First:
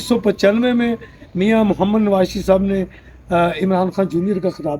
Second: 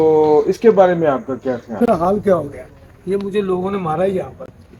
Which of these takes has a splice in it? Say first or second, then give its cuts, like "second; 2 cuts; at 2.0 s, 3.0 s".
second; 1 cut; at 1.8 s